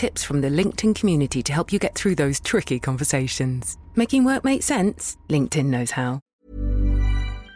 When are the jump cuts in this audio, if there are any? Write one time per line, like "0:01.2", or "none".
0:06.3